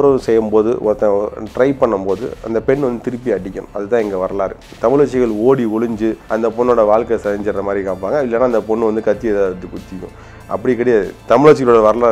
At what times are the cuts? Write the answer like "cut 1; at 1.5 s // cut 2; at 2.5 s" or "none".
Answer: cut 1; at 4.7 s // cut 2; at 6.2 s // cut 3; at 11.2 s